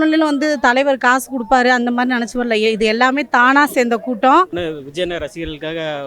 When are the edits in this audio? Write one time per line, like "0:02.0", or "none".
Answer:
0:04.5